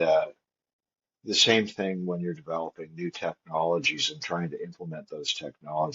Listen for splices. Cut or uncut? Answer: uncut